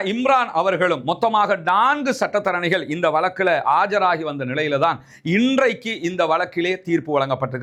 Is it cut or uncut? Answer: uncut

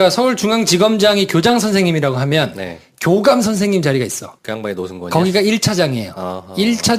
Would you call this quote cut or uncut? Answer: uncut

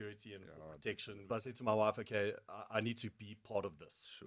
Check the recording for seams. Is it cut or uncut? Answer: cut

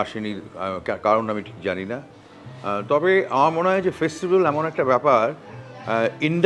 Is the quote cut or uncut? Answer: uncut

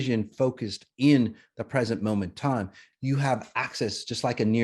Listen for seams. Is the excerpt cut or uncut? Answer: cut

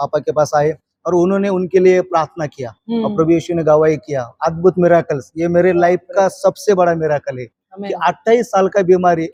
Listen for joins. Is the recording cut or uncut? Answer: uncut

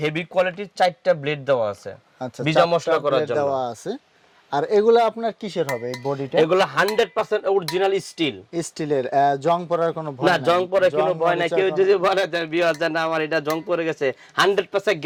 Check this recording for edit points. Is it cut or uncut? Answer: uncut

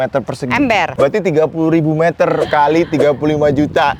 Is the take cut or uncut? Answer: cut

